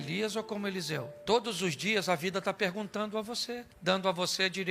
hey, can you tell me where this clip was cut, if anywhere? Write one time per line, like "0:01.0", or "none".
0:01.1